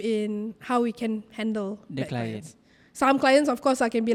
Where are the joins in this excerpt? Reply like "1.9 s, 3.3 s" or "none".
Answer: none